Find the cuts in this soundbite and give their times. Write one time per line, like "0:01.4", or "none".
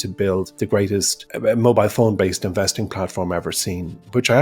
0:00.9